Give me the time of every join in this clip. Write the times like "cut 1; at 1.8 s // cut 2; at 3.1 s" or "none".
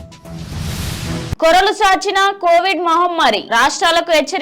cut 1; at 1.2 s